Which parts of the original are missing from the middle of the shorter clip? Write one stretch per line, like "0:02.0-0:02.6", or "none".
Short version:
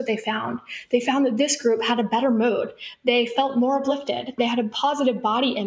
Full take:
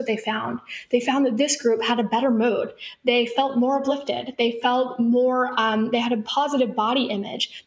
0:04.3-0:05.9